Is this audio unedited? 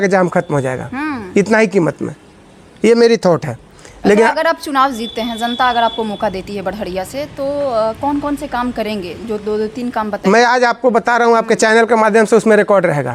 yes; 0 cuts

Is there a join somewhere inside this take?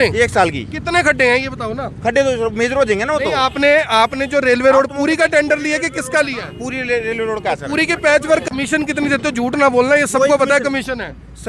yes; 1 cut; at 8.4 s

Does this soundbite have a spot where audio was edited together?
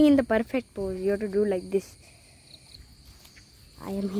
yes; 1 cut; at 2.8 s

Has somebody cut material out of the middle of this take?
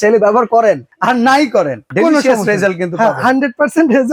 no; 0 cuts

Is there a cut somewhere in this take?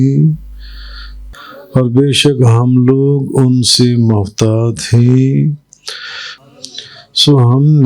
yes; 2 cuts; at 1.2 s, 6.3 s

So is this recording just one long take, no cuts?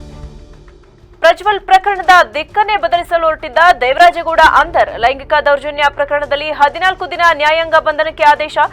no; 1 cut; at 0.9 s

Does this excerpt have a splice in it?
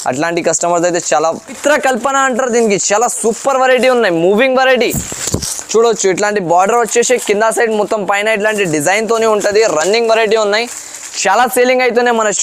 yes; 1 cut; at 1.6 s

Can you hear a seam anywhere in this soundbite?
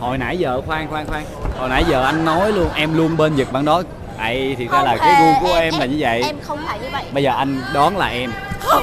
no; 0 cuts

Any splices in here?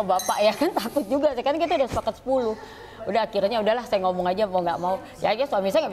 no; 0 cuts

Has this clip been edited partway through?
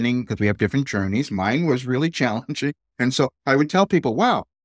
no; 0 cuts

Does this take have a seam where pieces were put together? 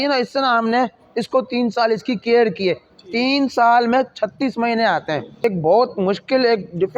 yes; 1 cut; at 5.4 s

